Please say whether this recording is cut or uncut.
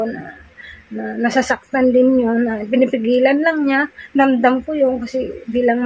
uncut